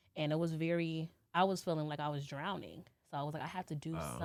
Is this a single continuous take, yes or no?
yes